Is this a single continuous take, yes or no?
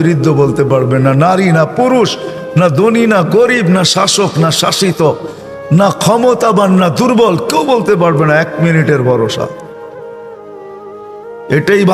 yes